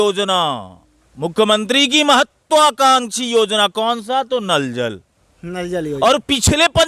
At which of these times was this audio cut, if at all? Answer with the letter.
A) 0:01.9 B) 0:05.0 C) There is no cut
C